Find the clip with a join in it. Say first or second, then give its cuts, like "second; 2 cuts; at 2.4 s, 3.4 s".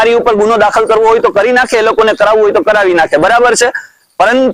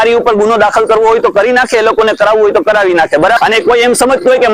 second; 1 cut; at 3.4 s